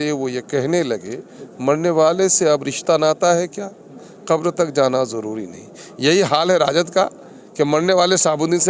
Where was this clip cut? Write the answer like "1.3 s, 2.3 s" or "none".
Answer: none